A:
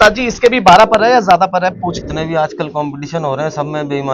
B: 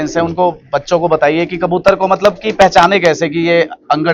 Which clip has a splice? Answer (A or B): A